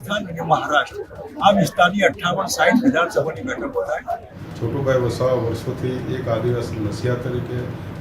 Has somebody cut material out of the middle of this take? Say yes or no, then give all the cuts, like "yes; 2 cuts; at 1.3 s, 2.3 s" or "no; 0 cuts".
yes; 1 cut; at 4.3 s